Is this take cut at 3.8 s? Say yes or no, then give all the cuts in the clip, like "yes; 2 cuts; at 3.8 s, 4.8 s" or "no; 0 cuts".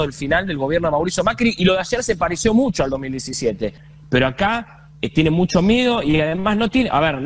yes; 1 cut; at 3.8 s